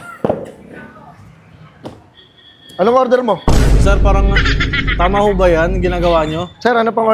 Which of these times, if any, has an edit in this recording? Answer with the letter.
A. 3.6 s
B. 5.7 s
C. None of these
C